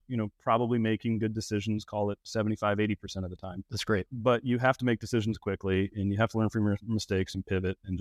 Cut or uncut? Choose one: uncut